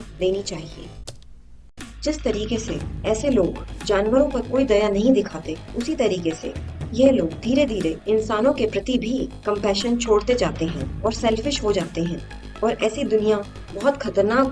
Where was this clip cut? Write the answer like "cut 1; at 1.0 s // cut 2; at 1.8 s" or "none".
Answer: cut 1; at 1.3 s